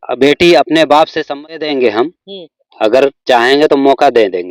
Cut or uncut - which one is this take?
cut